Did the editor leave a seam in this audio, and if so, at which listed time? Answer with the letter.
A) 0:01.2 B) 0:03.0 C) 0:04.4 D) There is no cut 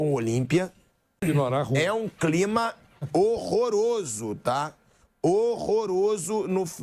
A